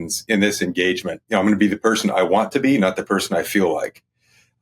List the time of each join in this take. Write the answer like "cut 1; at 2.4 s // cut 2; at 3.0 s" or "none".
cut 1; at 1.1 s